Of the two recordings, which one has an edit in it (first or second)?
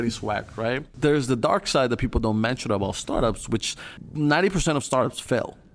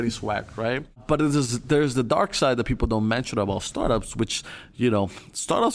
first